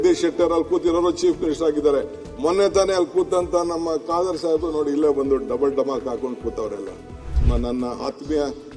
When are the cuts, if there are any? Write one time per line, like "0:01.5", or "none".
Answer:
0:07.3